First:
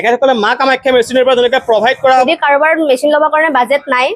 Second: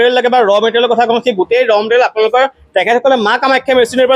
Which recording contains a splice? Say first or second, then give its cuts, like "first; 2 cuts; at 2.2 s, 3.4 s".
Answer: first; 1 cut; at 2.2 s